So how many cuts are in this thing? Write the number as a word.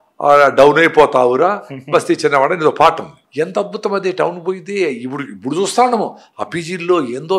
one